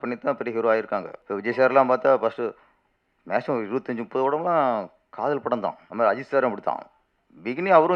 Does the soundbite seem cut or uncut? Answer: cut